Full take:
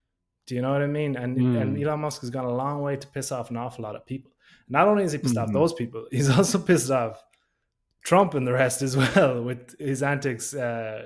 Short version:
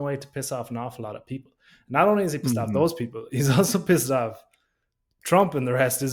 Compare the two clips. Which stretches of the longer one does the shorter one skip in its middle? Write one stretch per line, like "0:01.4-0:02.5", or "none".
none